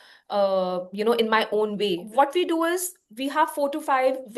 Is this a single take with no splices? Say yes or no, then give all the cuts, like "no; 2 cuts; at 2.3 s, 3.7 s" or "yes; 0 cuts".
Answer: no; 1 cut; at 2.0 s